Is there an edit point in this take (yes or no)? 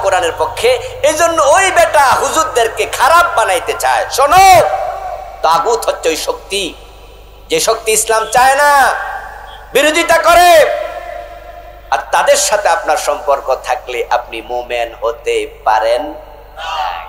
no